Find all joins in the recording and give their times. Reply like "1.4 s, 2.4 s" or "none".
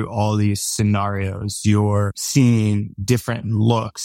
2.2 s